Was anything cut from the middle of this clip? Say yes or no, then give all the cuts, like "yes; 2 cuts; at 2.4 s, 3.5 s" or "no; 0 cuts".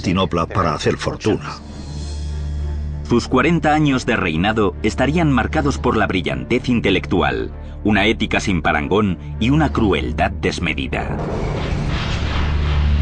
no; 0 cuts